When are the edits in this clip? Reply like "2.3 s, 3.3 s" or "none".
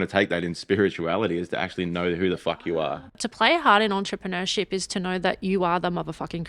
3.2 s

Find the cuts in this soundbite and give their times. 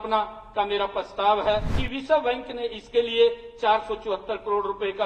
1.7 s

